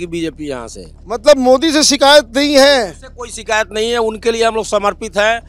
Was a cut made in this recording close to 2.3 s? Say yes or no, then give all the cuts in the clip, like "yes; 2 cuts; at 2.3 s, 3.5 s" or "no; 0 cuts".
no; 1 cut; at 0.9 s